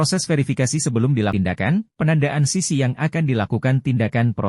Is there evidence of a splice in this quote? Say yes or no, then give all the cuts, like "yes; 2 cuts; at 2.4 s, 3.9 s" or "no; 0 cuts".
yes; 1 cut; at 1.3 s